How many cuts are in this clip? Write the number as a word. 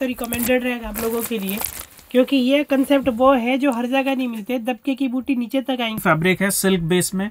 one